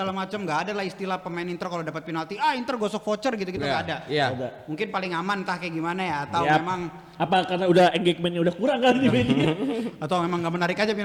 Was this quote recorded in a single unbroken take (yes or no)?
yes